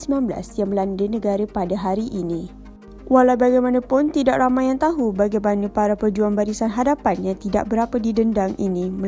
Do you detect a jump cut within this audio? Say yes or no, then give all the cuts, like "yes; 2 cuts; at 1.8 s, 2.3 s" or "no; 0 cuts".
no; 0 cuts